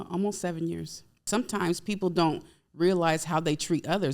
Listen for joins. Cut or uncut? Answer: cut